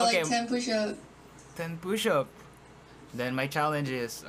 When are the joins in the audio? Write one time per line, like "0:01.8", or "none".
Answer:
0:03.0